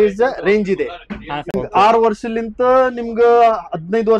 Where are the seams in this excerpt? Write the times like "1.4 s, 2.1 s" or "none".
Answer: 1.5 s